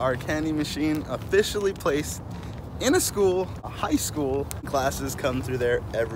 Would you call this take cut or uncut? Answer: cut